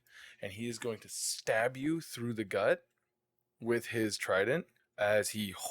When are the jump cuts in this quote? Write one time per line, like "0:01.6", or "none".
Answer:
0:04.8